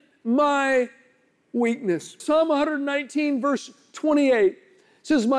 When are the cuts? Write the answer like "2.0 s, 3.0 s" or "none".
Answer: 2.2 s